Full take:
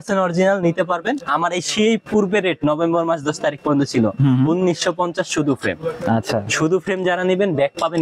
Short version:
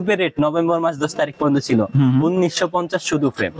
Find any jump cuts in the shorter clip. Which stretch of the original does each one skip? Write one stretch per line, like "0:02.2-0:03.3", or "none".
none

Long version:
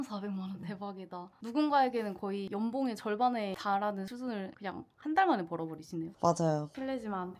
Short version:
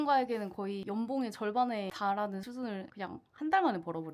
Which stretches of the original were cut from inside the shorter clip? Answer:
none

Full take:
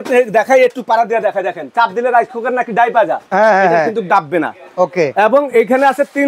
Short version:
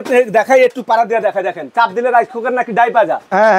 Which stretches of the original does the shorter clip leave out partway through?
none

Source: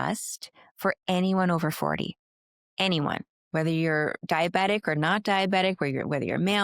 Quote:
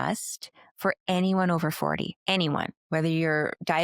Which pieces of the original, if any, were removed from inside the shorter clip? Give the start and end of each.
0:02.2-0:02.7
0:03.3-0:03.4

